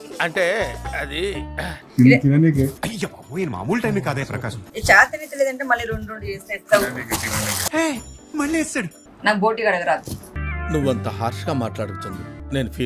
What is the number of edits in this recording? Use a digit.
1